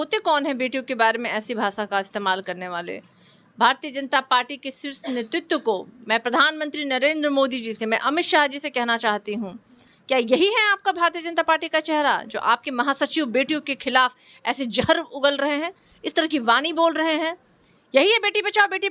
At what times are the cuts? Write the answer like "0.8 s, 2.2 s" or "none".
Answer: none